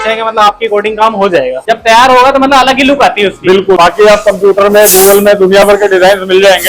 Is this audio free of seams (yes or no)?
no